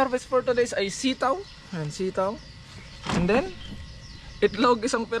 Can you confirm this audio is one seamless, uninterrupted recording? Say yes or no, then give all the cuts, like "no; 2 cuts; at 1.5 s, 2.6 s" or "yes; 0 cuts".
yes; 0 cuts